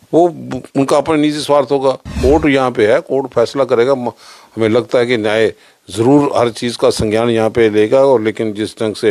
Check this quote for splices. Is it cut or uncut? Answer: cut